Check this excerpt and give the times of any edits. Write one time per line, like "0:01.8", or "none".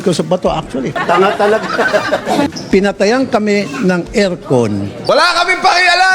0:00.9
0:02.6
0:05.0